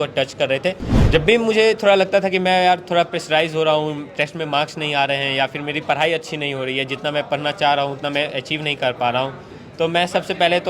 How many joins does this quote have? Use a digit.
1